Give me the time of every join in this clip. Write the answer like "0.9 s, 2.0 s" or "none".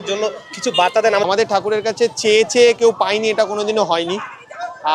1.2 s